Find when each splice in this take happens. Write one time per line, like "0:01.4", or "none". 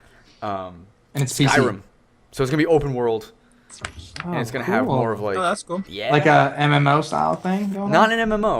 0:06.9